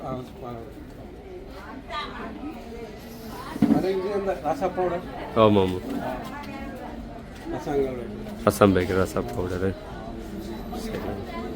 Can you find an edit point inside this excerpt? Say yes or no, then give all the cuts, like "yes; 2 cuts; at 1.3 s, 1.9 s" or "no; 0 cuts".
no; 0 cuts